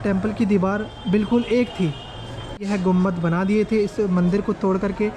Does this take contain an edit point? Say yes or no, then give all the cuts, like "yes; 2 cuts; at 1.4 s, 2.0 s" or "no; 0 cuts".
yes; 1 cut; at 2.6 s